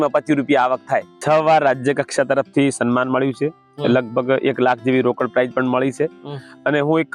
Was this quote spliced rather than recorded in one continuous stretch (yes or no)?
yes